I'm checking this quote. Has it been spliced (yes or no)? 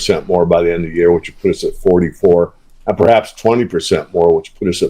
no